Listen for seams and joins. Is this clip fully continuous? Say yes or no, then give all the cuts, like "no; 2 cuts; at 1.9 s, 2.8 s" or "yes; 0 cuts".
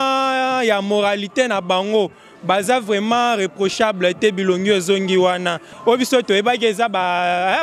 no; 1 cut; at 5.7 s